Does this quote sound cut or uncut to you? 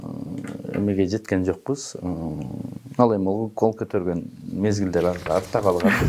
uncut